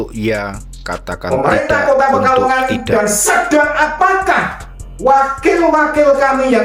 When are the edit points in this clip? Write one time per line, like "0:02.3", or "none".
none